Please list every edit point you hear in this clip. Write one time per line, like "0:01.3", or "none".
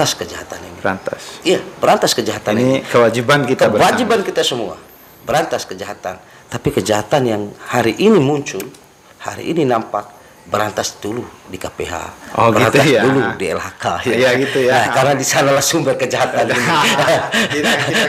none